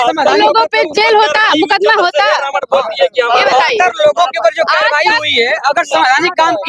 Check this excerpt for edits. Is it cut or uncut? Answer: uncut